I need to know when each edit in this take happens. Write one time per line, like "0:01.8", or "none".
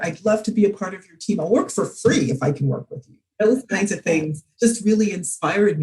0:03.3
0:04.4

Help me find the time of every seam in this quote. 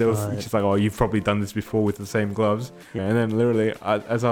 0:03.0

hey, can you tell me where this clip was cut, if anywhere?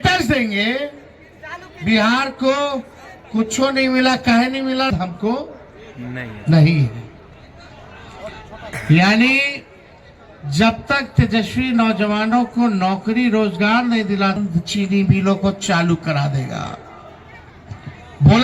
0:04.9
0:14.4

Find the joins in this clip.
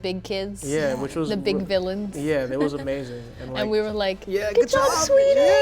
0:04.2

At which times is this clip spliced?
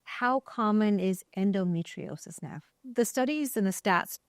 0:01.2
0:02.8

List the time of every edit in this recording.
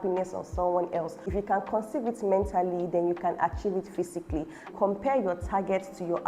0:01.2
0:04.7

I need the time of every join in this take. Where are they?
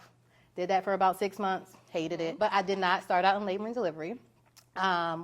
0:02.3

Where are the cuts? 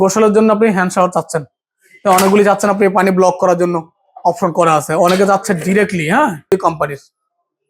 0:06.5

